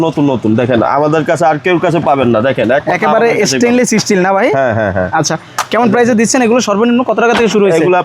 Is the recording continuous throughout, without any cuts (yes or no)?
yes